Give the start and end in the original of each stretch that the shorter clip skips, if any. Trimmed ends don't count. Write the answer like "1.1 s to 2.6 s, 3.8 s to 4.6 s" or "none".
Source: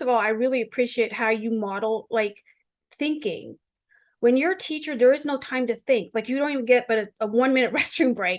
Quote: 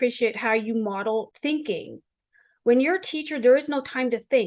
2.0 s to 2.8 s